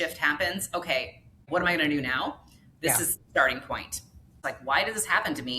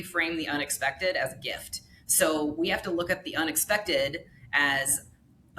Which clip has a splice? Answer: first; 2 cuts; at 1.4 s, 4.5 s

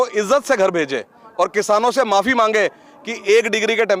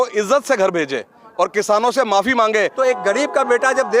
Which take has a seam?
second; 1 cut; at 2.7 s

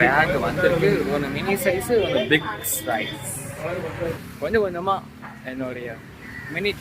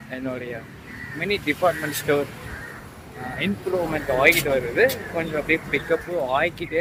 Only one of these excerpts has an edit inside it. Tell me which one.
first; 1 cut; at 4.2 s

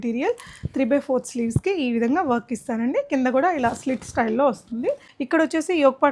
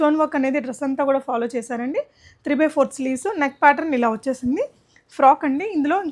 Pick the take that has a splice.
first; 1 cut; at 5.1 s

